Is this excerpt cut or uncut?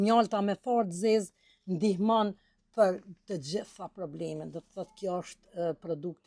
uncut